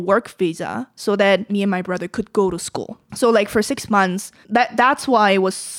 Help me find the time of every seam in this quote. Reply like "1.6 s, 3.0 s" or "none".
1.5 s, 3.0 s, 4.3 s